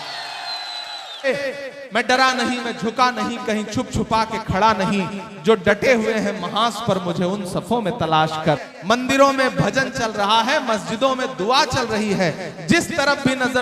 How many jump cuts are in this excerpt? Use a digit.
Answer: 2